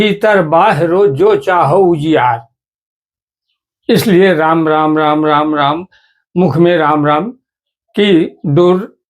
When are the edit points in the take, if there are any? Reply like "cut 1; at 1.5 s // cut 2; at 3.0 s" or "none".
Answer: none